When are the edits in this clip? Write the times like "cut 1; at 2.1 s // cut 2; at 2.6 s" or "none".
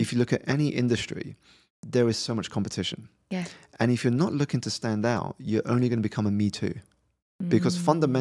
none